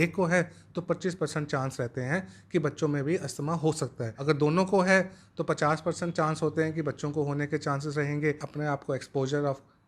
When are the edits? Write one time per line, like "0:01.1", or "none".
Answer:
0:04.1
0:08.4